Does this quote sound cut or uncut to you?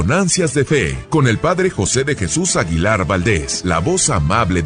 cut